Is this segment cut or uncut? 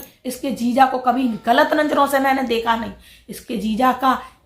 uncut